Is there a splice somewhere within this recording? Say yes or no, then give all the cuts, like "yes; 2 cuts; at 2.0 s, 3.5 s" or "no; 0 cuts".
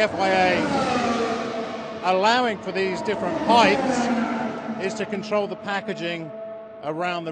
yes; 1 cut; at 1.0 s